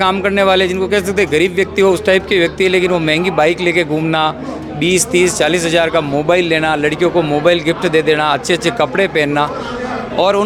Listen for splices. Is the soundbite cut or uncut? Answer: uncut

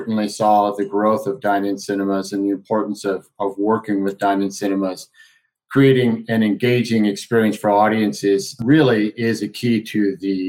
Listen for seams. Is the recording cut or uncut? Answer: uncut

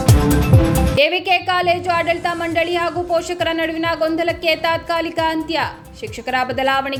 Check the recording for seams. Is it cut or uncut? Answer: uncut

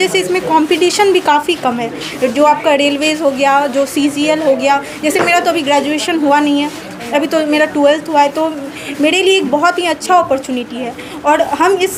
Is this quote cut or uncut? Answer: uncut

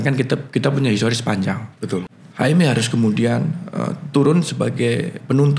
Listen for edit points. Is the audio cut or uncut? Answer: cut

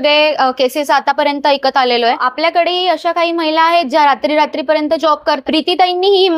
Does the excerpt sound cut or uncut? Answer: cut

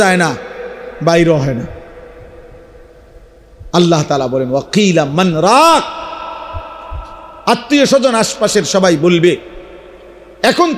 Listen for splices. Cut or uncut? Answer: uncut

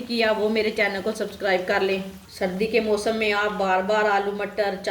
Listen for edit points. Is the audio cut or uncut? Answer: cut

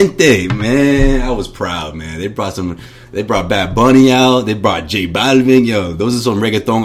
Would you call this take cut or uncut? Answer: uncut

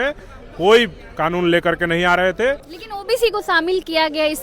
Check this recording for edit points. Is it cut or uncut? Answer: cut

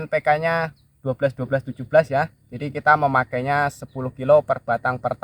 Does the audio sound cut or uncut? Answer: uncut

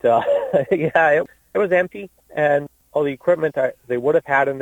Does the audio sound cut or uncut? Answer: cut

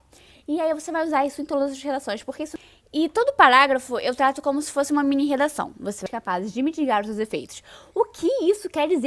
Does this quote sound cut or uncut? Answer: cut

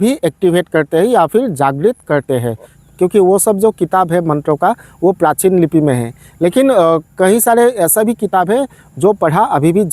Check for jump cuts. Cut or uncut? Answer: cut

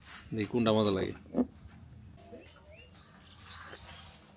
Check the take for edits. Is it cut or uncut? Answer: cut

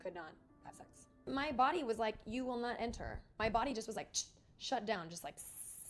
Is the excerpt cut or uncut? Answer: cut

